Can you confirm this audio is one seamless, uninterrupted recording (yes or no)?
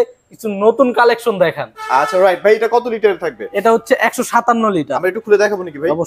yes